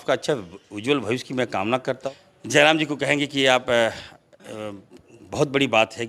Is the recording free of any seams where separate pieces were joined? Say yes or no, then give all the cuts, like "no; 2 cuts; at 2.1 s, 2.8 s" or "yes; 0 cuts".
no; 1 cut; at 2.0 s